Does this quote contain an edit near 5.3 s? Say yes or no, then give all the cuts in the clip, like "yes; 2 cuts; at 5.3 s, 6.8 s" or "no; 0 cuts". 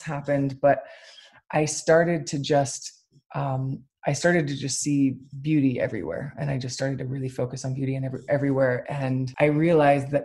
no; 1 cut; at 9.3 s